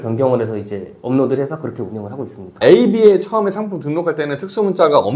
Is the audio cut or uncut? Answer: uncut